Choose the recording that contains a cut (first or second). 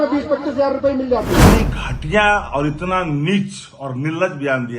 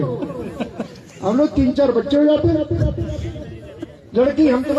first